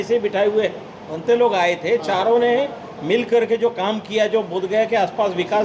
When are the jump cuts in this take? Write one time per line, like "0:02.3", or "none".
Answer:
0:01.1